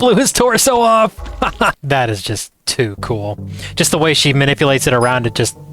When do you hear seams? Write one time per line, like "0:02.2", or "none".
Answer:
0:01.8